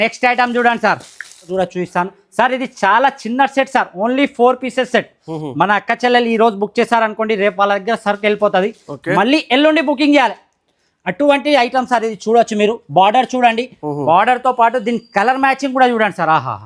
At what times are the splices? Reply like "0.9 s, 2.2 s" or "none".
1.5 s